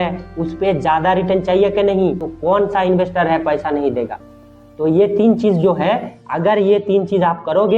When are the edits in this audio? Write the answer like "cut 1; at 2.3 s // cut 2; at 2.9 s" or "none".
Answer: cut 1; at 2.3 s